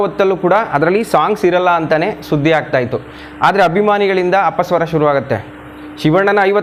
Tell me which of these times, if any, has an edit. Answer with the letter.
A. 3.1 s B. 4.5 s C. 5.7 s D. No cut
D